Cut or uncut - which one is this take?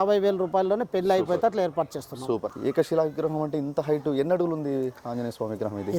cut